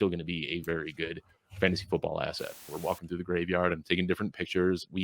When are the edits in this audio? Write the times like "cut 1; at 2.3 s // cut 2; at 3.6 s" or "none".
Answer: cut 1; at 2.7 s